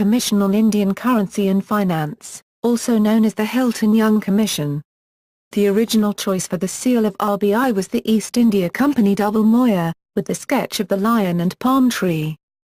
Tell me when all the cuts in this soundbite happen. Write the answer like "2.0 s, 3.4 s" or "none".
none